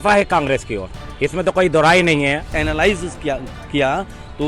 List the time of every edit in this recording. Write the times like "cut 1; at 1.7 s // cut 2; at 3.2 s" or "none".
cut 1; at 2.6 s